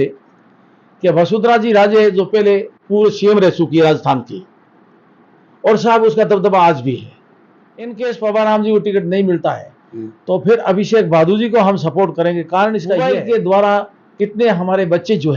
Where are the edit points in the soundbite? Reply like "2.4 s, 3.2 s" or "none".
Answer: 7.9 s, 13.0 s